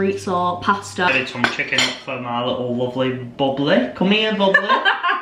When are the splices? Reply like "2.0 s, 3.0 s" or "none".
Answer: 1.1 s

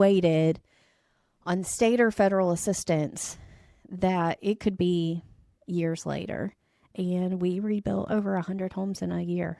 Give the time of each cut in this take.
6.9 s

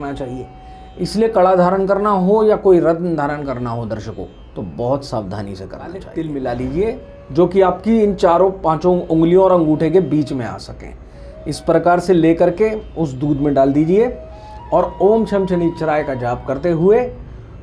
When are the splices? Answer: 6.0 s

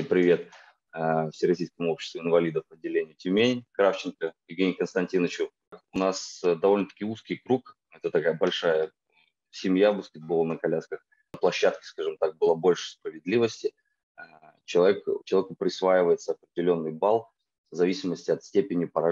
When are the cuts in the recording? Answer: 5.8 s, 11.4 s

